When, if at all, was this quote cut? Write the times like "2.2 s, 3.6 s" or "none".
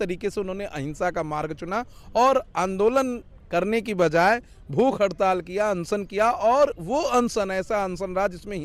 none